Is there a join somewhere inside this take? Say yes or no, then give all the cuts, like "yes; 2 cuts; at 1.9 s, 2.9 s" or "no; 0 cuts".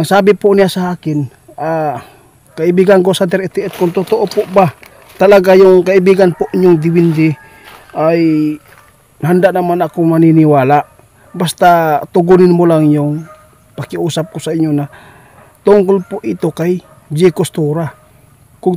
no; 0 cuts